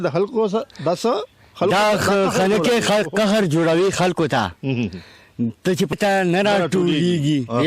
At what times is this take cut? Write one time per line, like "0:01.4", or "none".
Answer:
0:05.9